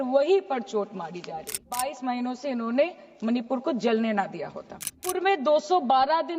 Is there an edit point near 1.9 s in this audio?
yes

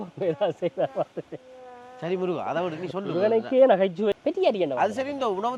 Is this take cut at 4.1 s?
yes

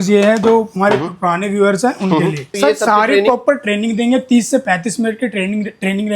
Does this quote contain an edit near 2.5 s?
yes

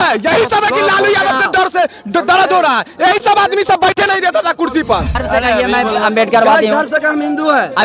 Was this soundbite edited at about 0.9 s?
no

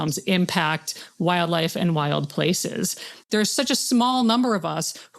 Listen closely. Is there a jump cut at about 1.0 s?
no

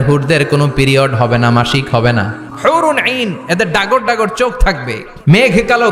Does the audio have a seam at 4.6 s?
yes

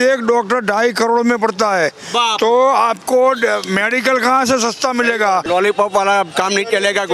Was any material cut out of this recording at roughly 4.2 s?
no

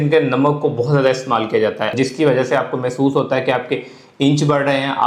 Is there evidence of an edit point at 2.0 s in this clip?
yes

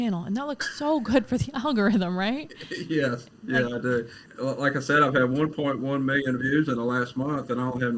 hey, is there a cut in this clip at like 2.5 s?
no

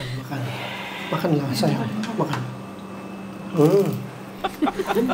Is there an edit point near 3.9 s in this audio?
no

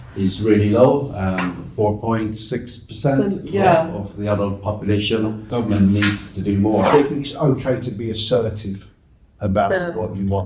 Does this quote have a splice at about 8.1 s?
no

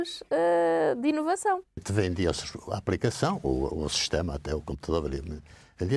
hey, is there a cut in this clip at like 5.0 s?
no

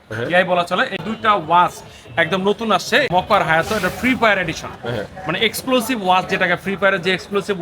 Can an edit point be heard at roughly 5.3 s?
no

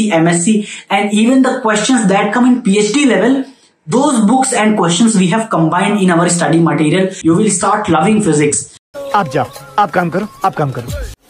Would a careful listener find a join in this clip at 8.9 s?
no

